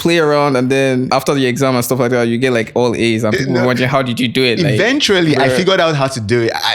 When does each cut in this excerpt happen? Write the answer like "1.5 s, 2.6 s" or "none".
1.1 s